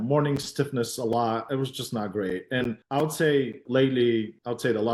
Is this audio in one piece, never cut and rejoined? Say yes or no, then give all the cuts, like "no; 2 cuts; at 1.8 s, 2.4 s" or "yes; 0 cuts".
yes; 0 cuts